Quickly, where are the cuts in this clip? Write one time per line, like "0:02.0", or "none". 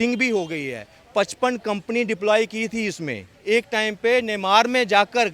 0:03.3